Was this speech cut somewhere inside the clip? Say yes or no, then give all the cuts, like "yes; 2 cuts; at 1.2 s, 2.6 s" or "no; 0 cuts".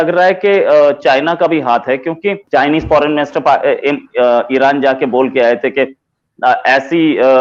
no; 0 cuts